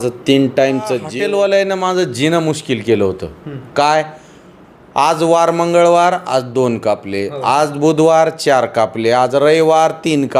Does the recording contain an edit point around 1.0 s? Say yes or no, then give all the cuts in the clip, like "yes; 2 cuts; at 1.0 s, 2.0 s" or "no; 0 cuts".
yes; 1 cut; at 1.0 s